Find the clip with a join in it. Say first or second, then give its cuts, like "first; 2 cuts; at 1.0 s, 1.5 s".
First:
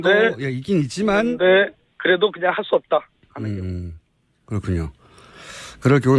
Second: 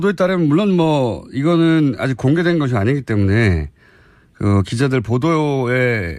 second; 1 cut; at 1.3 s